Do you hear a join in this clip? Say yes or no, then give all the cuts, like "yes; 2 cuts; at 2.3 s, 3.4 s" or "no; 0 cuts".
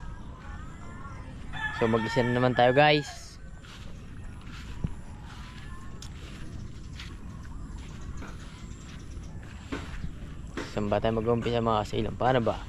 no; 0 cuts